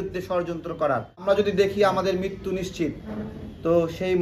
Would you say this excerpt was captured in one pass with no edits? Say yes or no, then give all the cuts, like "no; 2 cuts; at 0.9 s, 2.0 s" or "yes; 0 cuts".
no; 1 cut; at 1.2 s